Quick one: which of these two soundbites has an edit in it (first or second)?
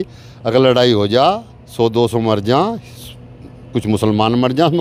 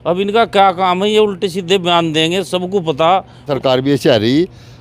second